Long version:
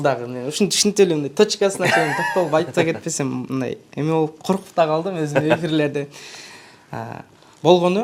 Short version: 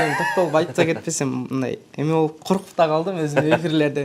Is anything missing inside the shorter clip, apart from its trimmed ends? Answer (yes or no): no